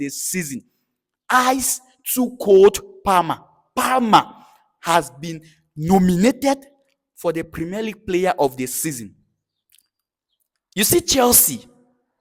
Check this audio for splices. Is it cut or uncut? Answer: uncut